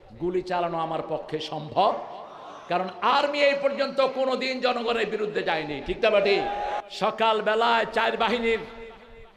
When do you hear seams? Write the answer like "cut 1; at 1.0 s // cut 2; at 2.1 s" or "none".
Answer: cut 1; at 6.8 s